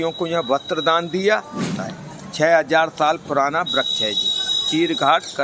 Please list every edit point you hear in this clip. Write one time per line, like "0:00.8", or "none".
0:01.7